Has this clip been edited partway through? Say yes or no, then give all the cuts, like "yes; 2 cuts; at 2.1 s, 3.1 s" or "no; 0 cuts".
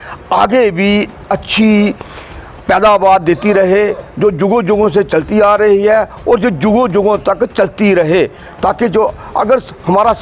no; 0 cuts